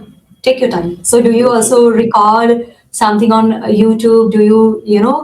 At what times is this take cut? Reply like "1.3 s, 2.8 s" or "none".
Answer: 1.0 s